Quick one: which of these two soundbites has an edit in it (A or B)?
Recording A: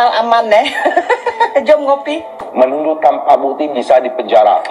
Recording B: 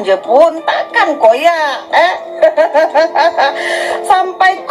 A